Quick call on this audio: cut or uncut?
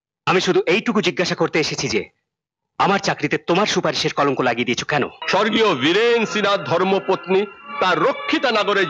cut